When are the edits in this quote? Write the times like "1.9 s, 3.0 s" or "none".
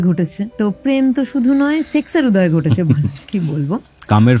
0.8 s, 3.1 s